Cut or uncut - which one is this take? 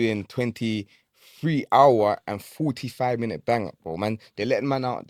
uncut